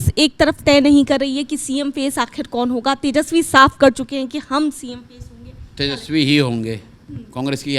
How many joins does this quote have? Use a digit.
0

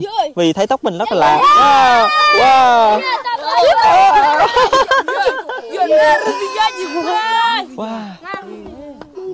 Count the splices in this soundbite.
0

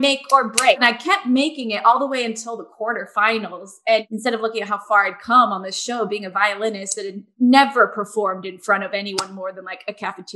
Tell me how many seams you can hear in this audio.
2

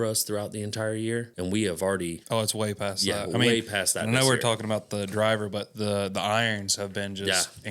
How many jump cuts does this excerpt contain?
2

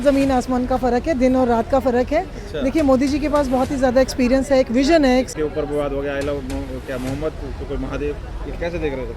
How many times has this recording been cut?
1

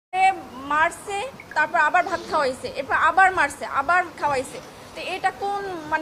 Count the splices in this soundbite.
0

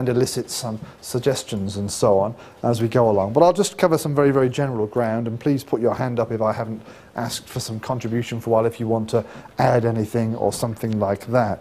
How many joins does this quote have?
1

